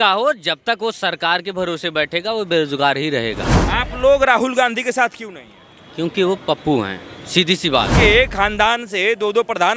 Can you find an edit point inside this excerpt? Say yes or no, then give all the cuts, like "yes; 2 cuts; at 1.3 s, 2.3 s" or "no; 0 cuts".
yes; 2 cuts; at 3.5 s, 7.9 s